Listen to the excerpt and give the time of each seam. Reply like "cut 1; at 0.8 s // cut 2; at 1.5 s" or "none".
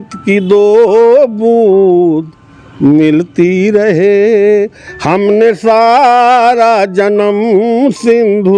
none